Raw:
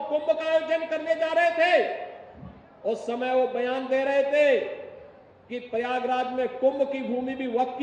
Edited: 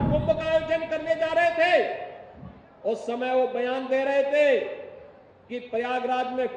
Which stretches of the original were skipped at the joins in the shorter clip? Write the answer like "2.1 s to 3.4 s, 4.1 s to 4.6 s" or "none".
none